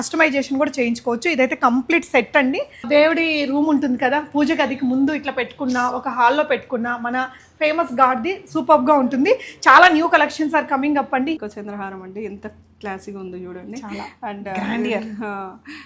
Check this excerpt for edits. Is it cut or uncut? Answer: cut